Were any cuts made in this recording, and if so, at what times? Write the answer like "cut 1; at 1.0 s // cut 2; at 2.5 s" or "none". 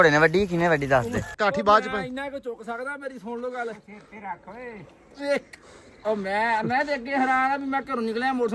cut 1; at 1.3 s